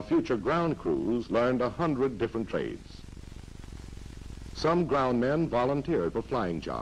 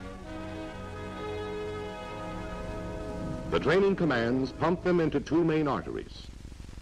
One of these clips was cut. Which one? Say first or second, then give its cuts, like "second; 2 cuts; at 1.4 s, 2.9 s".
second; 1 cut; at 2.2 s